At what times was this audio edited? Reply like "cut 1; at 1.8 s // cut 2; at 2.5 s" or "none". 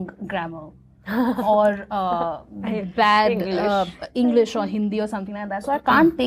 none

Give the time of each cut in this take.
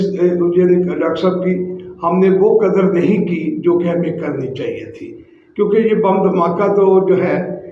none

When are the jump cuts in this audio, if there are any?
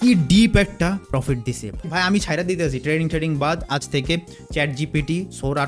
none

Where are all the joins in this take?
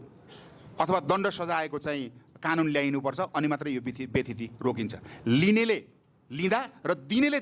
none

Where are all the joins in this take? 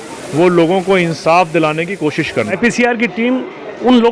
cut 1; at 2.6 s

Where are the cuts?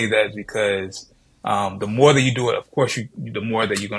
none

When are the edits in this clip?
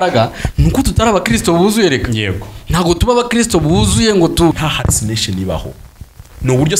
cut 1; at 4.6 s

